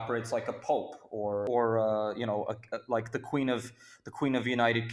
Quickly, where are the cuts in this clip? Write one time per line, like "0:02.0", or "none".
0:01.5

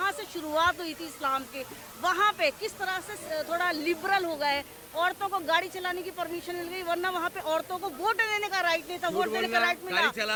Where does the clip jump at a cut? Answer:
none

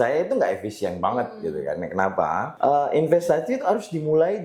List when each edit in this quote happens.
0:02.5

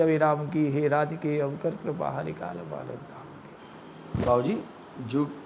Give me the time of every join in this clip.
0:03.6

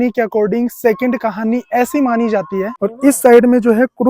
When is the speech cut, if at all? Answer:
0:02.7

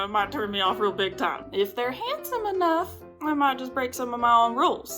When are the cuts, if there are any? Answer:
0:01.4

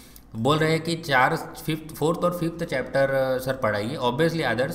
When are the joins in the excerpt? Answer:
none

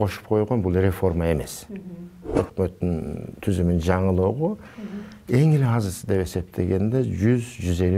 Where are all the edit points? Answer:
0:02.3

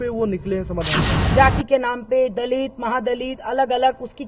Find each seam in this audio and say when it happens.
0:01.1

